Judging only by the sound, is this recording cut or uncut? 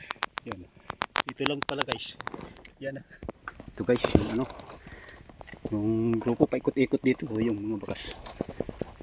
cut